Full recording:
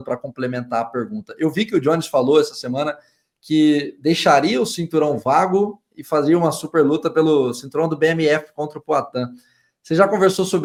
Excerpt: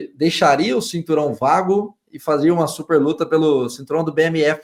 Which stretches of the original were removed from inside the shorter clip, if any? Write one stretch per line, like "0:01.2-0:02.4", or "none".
none